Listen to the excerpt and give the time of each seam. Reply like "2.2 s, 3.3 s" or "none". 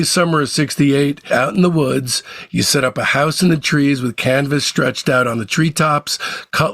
1.2 s